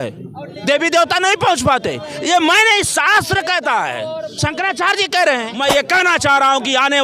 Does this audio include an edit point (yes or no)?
yes